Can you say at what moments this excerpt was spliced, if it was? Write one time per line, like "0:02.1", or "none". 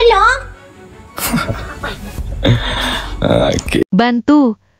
0:03.8